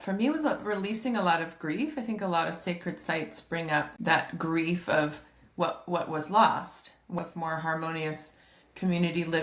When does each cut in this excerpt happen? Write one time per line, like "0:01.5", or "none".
0:03.9
0:07.2